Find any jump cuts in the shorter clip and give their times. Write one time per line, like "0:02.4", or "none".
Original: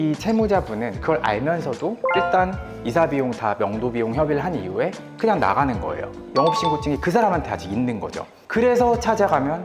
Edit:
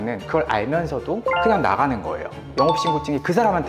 0:01.2